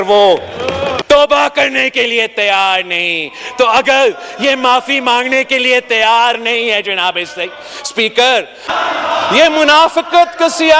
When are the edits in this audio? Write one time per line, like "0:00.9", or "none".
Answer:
0:01.0
0:08.7